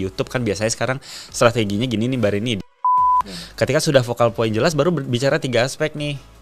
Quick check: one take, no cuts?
no; 1 cut; at 2.9 s

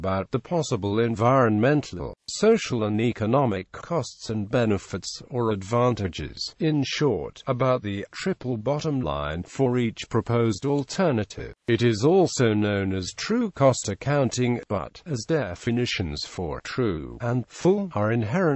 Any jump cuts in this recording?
yes; 1 cut; at 13.1 s

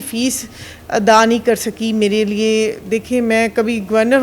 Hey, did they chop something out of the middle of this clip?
no; 0 cuts

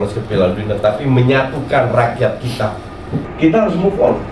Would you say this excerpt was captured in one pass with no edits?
no; 1 cut; at 3.3 s

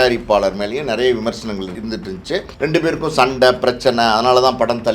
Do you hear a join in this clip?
yes; 1 cut; at 2.2 s

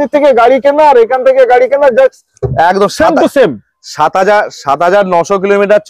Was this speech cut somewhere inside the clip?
no; 0 cuts

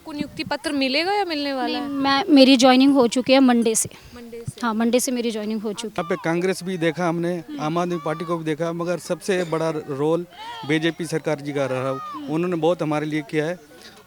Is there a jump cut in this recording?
yes; 1 cut; at 6.0 s

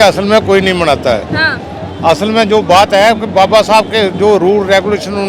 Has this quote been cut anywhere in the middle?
no; 0 cuts

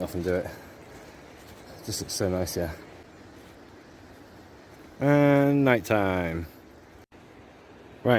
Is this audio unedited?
no; 1 cut; at 3.0 s

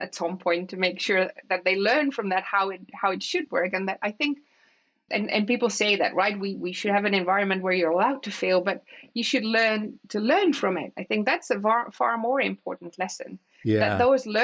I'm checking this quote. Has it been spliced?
no; 0 cuts

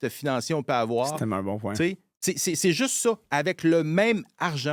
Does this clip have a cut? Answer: no; 0 cuts

